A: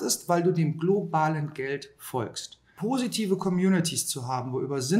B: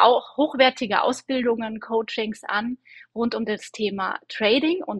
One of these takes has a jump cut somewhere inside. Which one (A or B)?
A